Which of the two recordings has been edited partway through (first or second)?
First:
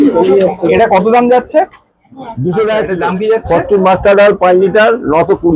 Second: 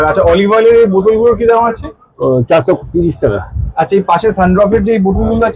first